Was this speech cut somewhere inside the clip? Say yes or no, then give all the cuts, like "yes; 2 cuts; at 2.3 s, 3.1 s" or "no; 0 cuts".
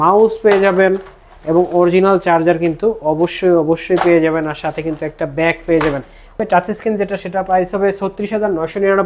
yes; 1 cut; at 6.4 s